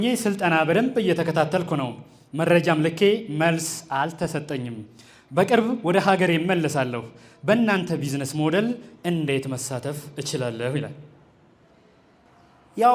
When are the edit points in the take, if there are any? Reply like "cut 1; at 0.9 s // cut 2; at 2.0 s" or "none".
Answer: none